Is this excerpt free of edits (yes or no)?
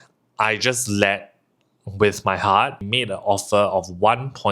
no